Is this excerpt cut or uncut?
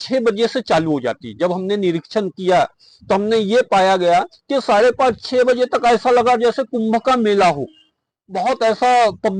uncut